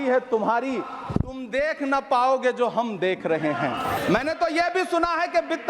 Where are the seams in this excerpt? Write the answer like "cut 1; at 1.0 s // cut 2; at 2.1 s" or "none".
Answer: cut 1; at 4.0 s